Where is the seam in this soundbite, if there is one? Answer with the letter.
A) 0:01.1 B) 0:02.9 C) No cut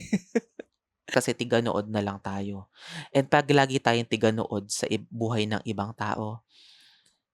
A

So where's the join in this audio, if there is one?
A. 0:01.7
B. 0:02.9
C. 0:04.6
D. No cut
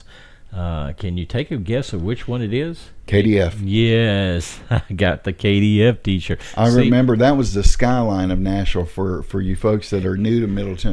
B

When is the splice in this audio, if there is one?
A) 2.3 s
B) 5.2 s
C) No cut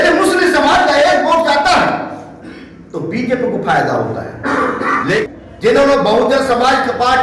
B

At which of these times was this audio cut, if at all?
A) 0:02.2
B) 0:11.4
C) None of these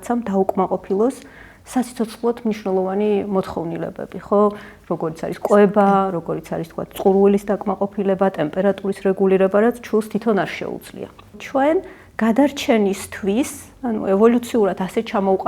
B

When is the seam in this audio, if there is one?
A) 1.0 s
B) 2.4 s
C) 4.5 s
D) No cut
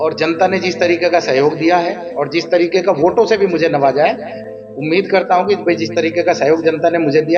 C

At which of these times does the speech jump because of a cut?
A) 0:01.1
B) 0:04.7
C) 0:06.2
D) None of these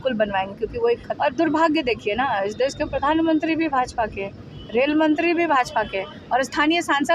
A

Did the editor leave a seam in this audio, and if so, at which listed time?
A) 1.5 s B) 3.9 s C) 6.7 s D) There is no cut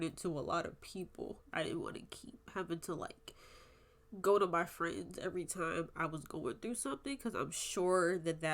A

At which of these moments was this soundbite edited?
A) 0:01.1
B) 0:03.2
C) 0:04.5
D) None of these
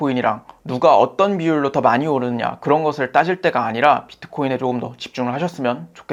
D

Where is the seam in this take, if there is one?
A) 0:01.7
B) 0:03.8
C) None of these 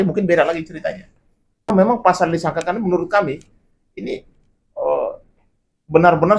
A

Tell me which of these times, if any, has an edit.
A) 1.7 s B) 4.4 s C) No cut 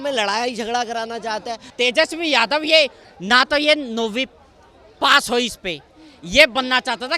A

